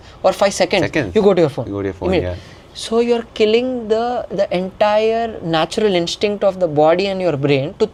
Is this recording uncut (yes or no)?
yes